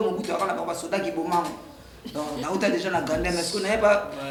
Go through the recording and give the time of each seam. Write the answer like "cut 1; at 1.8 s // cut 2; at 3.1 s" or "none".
none

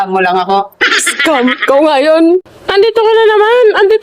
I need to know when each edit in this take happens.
cut 1; at 2.6 s

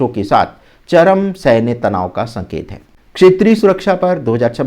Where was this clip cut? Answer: none

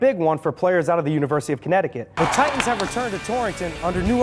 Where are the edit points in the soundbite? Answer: cut 1; at 2.2 s

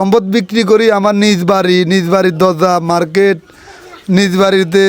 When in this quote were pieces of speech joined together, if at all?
none

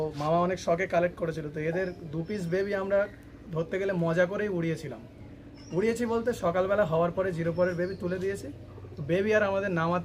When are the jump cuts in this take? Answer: none

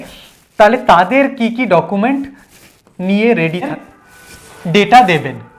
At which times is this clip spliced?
cut 1; at 3.7 s

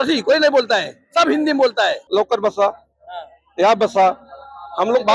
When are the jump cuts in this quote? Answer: cut 1; at 2.0 s

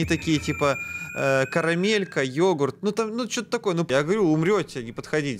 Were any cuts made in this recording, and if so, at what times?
cut 1; at 3.9 s

